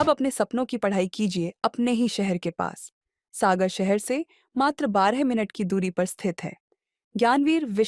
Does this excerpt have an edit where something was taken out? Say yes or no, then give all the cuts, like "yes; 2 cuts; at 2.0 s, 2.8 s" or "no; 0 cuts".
no; 0 cuts